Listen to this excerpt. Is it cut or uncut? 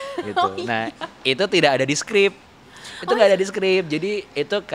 uncut